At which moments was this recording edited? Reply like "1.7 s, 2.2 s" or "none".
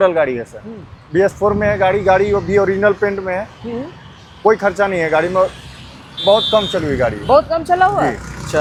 none